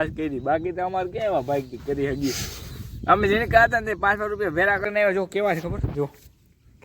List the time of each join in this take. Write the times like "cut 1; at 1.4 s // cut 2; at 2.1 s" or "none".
cut 1; at 4.8 s